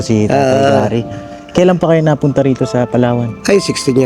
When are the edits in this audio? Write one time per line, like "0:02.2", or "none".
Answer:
none